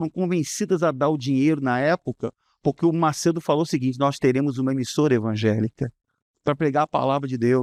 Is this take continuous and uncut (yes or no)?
yes